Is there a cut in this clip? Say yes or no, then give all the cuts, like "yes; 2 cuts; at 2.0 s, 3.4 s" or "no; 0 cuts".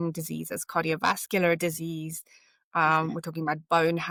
no; 0 cuts